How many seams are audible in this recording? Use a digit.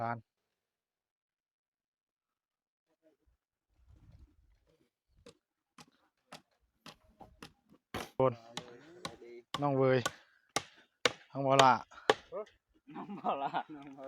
1